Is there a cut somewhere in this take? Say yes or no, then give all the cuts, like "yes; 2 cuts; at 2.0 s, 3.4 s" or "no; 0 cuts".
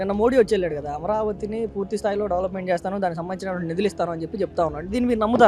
no; 0 cuts